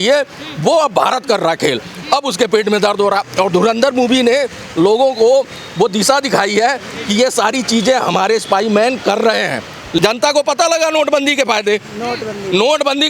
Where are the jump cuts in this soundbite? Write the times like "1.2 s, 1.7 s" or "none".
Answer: 10.0 s